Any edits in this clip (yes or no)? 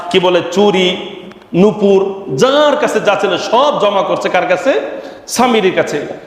no